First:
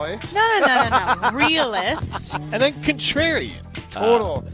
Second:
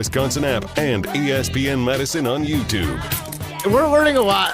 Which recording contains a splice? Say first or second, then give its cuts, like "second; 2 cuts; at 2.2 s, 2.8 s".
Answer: second; 1 cut; at 3.5 s